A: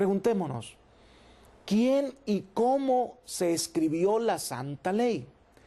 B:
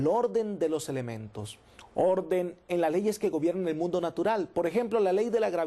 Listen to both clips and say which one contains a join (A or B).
B